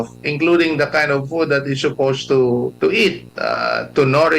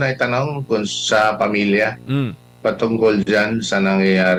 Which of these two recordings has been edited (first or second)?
first